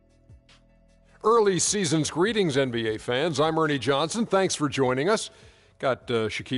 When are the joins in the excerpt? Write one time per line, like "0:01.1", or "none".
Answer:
0:01.2